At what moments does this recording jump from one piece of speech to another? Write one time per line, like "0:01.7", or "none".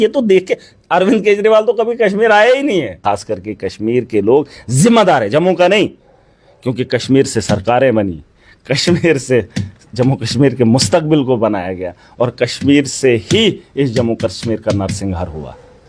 0:03.0